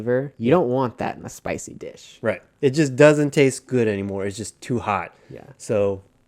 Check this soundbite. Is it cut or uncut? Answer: uncut